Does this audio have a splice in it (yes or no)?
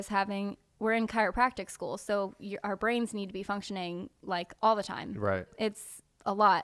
no